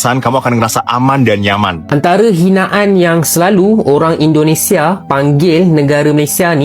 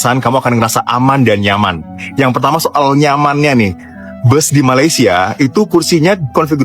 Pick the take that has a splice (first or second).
first